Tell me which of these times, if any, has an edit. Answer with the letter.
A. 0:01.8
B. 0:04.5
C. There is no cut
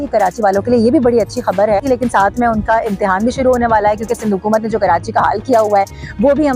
A